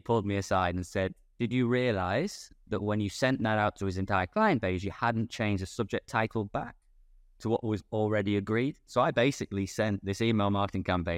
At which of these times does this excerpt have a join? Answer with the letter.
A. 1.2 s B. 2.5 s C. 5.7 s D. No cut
A